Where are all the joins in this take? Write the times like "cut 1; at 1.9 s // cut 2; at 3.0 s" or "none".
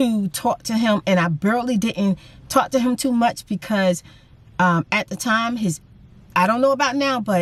none